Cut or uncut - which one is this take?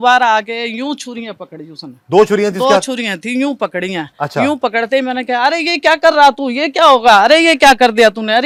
uncut